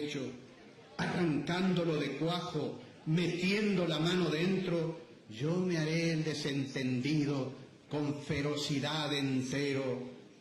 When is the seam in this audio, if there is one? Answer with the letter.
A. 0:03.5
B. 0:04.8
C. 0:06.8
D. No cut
D